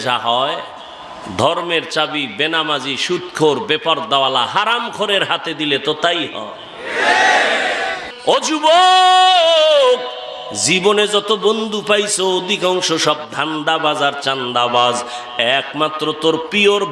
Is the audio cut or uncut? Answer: cut